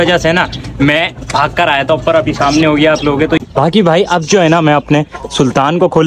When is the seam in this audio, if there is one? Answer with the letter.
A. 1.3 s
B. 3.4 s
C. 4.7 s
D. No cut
B